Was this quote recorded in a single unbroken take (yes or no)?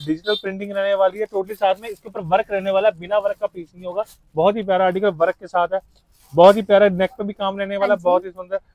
yes